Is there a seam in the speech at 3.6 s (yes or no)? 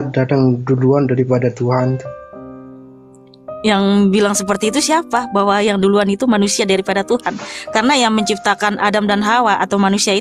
yes